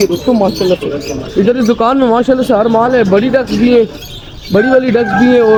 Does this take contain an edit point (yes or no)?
no